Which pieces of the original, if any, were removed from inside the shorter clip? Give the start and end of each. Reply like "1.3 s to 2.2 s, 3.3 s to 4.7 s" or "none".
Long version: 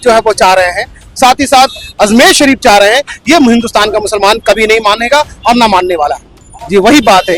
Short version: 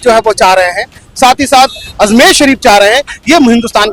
none